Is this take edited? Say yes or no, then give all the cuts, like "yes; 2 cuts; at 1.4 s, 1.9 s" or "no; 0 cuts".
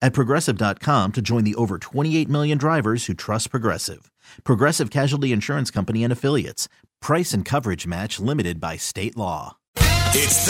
yes; 1 cut; at 9.6 s